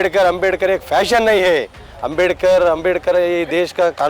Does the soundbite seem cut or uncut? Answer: uncut